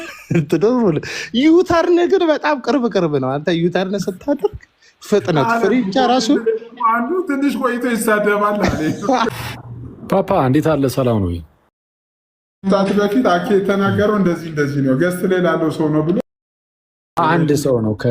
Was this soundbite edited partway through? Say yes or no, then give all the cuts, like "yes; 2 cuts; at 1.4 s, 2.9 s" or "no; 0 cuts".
yes; 2 cuts; at 9.3 s, 17.2 s